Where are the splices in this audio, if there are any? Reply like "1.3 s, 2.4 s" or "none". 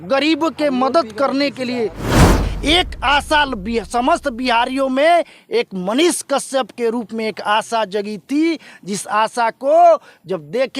2.5 s

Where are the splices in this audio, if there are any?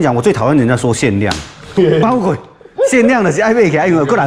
none

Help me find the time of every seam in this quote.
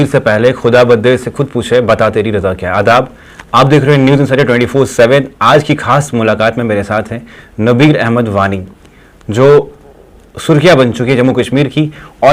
none

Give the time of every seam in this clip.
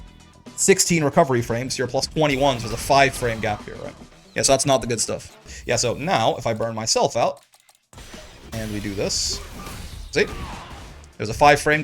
5.5 s

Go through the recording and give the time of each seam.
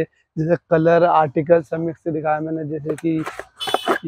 none

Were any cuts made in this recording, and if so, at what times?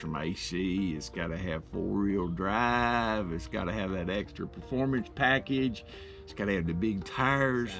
none

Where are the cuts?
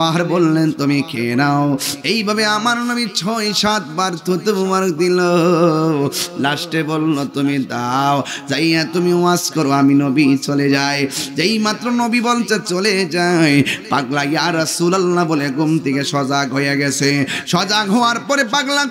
none

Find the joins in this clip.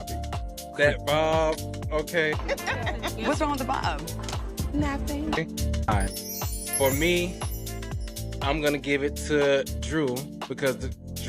5.9 s

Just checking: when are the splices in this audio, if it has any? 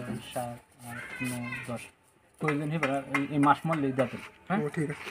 none

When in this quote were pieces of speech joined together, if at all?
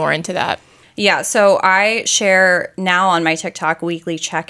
none

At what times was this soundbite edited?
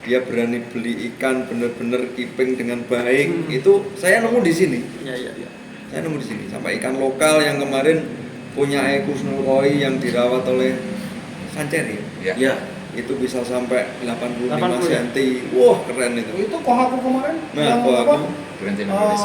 none

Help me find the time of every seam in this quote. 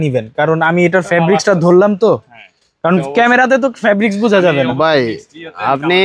none

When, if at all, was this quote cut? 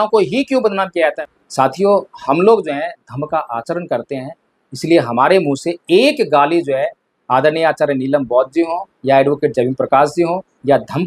1.2 s

